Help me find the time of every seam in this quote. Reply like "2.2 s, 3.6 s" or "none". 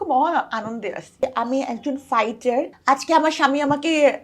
1.2 s, 2.7 s